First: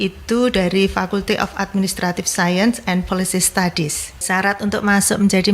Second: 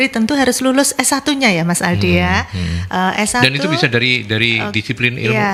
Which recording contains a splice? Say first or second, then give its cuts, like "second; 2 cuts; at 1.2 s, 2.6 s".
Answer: first; 1 cut; at 4.2 s